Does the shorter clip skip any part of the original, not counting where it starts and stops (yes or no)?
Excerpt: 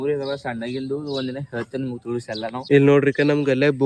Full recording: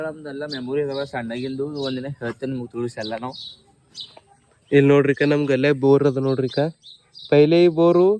yes